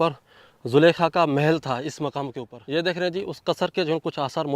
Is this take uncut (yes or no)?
no